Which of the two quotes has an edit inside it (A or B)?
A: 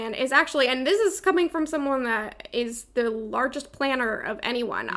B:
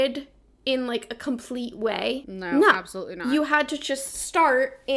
B